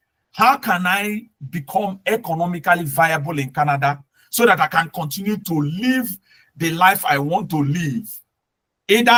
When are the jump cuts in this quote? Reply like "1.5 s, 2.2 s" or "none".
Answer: none